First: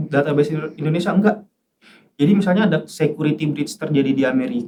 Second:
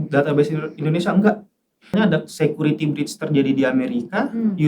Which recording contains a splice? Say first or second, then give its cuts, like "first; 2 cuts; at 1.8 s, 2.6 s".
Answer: second; 1 cut; at 2.0 s